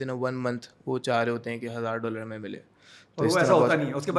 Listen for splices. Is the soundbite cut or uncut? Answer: uncut